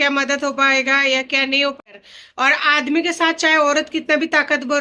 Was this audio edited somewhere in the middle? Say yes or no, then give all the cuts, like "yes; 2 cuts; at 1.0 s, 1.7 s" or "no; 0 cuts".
yes; 1 cut; at 1.8 s